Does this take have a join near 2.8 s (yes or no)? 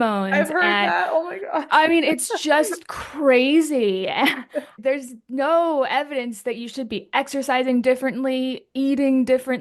no